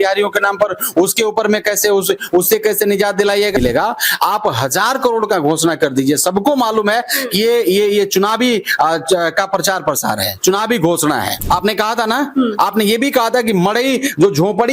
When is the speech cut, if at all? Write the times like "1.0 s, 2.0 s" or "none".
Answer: 3.6 s, 11.3 s